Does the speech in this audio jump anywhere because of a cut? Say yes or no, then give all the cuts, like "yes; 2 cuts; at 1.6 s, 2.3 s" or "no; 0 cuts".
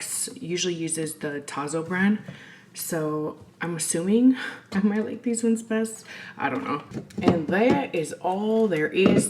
yes; 1 cut; at 6.9 s